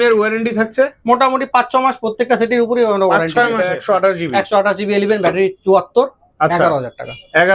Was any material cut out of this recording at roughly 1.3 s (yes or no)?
no